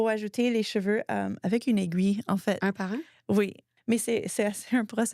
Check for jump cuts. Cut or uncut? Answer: cut